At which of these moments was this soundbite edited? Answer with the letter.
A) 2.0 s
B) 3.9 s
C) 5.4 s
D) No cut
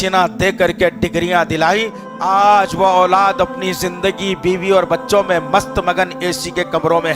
A